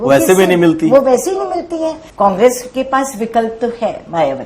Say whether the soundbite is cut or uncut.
cut